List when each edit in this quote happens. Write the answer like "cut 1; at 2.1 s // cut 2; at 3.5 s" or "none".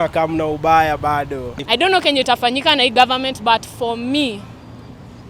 cut 1; at 1.5 s